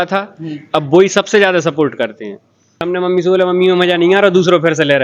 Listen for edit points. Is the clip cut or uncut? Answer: cut